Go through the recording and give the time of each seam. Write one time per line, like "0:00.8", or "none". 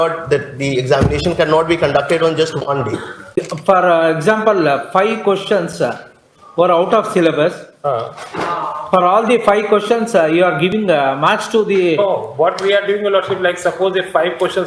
0:03.3

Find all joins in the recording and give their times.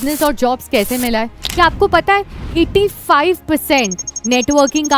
0:01.4

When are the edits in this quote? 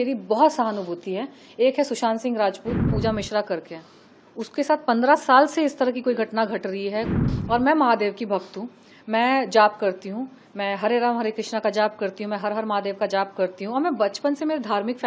0:02.9
0:07.2

